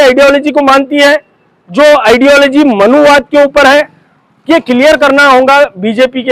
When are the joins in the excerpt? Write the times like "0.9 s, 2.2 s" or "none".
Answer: none